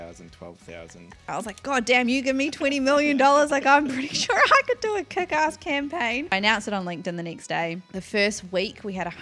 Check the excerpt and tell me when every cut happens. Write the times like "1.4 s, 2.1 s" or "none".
1.3 s, 6.3 s